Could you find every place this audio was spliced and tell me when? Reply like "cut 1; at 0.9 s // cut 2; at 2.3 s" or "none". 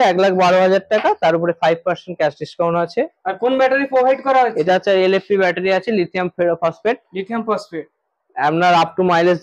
none